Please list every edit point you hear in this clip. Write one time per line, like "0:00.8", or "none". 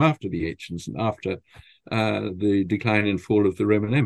none